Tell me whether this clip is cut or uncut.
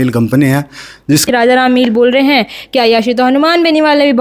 cut